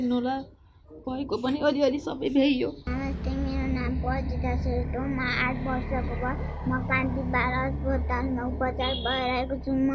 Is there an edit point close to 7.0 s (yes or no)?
no